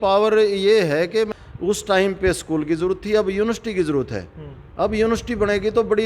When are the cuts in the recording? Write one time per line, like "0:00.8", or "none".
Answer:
0:01.3